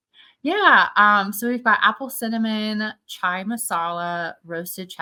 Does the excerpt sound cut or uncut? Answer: uncut